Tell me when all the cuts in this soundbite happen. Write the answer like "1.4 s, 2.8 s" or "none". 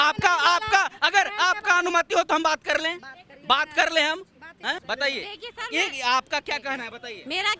4.8 s